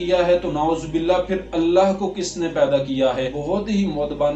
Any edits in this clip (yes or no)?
yes